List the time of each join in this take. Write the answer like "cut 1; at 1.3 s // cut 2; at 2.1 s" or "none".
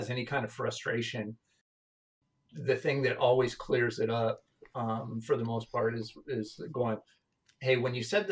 cut 1; at 1.7 s